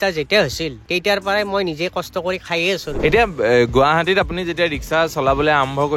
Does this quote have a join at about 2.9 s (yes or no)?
yes